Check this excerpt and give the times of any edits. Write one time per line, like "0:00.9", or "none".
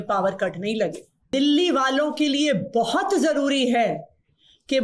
0:01.3

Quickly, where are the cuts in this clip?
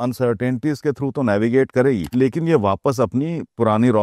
0:02.1

